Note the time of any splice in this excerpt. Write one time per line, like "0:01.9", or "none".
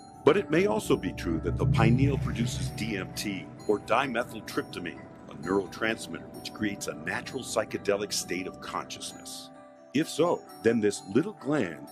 none